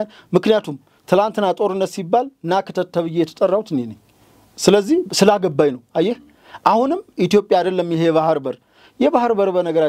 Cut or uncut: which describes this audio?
uncut